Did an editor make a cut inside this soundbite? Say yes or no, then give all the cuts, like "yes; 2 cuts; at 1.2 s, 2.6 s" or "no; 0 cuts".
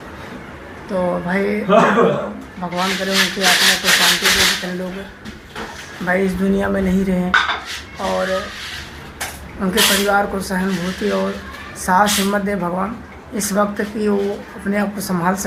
no; 0 cuts